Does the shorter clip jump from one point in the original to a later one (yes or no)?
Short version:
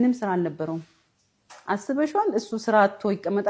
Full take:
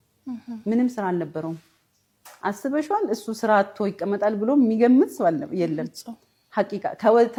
no